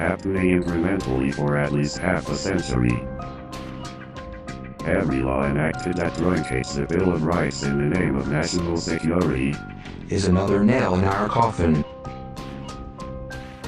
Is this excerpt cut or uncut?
cut